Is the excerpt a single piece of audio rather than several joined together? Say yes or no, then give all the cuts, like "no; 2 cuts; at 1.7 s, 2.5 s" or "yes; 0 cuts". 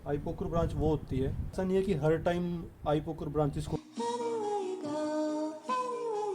no; 2 cuts; at 1.5 s, 3.7 s